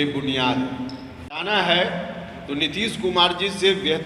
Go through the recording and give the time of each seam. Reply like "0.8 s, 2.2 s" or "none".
1.4 s